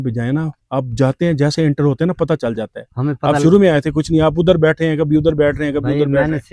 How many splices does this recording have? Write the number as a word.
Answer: zero